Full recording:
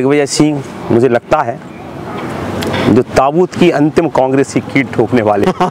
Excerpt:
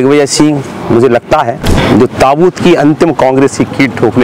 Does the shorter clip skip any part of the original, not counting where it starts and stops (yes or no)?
yes